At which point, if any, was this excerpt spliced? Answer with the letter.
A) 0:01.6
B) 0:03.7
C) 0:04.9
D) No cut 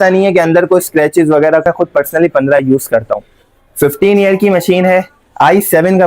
A